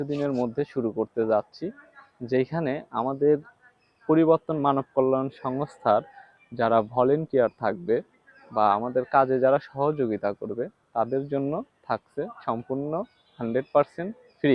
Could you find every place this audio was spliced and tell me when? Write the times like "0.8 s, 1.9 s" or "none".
none